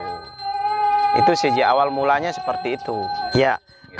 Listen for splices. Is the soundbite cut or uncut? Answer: cut